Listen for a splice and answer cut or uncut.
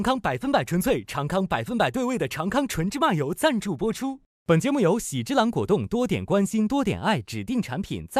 uncut